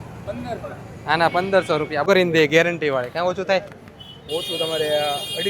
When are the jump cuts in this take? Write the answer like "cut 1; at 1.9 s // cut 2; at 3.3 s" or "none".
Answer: cut 1; at 2.1 s

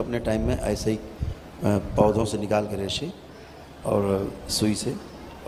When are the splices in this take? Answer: none

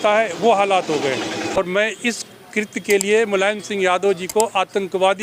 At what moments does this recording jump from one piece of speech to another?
cut 1; at 1.6 s

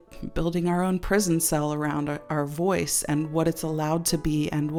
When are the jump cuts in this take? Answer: none

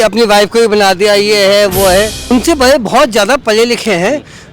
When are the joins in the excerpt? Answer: cut 1; at 2.3 s

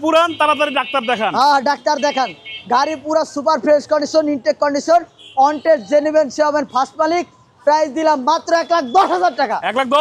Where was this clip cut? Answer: none

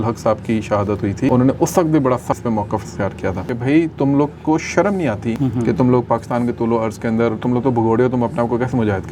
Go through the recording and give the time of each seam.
cut 1; at 1.3 s // cut 2; at 2.4 s // cut 3; at 3.5 s // cut 4; at 5.3 s

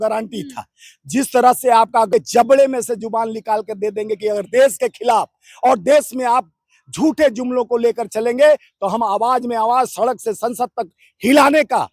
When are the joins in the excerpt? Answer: cut 1; at 2.1 s

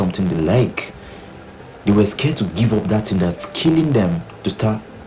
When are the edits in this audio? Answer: none

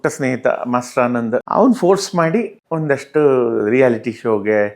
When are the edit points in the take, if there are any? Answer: cut 1; at 1.4 s

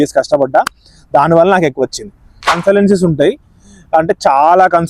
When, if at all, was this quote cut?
cut 1; at 2.5 s

